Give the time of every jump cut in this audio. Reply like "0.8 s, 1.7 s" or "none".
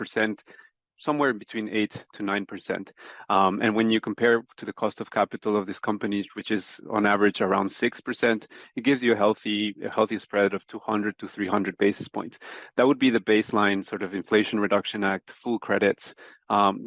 none